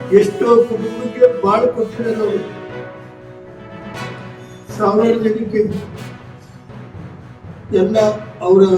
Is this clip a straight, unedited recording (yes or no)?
no